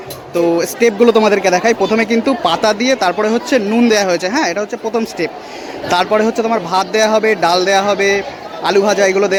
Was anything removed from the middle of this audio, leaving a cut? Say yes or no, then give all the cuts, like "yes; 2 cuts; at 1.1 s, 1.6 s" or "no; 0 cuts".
no; 0 cuts